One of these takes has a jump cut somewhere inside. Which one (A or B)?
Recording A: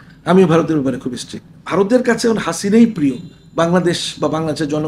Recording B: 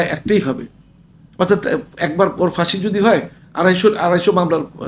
A